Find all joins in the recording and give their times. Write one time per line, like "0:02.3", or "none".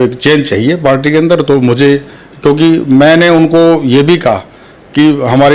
none